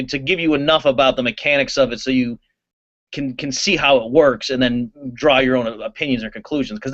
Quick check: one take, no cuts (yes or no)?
yes